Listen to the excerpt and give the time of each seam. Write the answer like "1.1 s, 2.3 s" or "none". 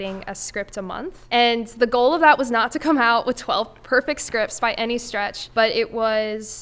1.2 s, 5.4 s